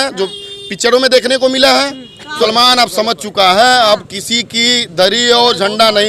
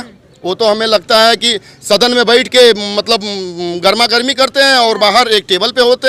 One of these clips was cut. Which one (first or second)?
first